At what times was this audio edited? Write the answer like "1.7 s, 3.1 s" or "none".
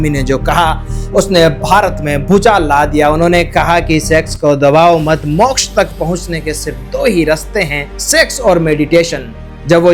none